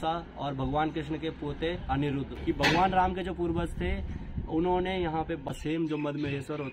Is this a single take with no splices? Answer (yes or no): no